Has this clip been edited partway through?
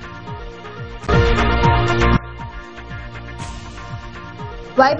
yes; 1 cut; at 1.0 s

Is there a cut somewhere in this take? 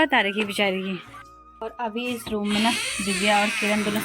yes; 1 cut; at 1.1 s

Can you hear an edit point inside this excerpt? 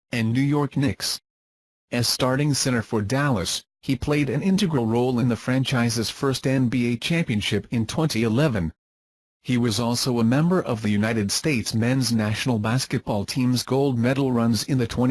yes; 1 cut; at 9.9 s

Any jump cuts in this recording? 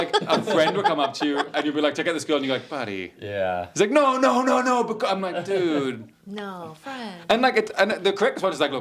no; 0 cuts

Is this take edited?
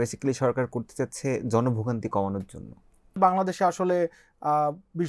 yes; 1 cut; at 3.2 s

